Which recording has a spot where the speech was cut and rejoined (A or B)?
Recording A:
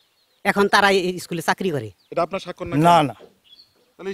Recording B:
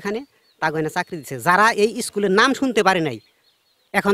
A